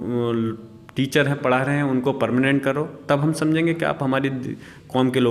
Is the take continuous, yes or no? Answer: yes